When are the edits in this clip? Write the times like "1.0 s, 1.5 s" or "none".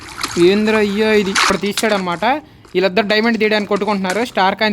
1.4 s